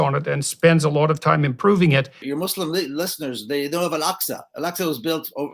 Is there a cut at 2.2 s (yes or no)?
yes